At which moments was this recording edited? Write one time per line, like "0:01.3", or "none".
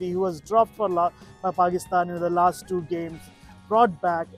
none